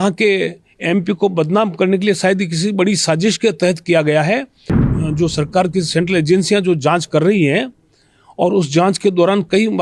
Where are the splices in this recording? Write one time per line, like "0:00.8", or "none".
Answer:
0:04.9